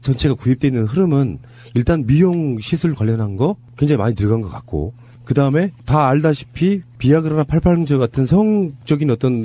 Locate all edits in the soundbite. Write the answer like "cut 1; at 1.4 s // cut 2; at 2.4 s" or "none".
cut 1; at 3.9 s